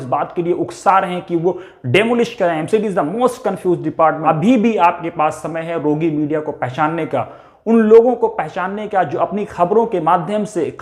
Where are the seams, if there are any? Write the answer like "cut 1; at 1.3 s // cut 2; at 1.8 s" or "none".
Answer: cut 1; at 4.2 s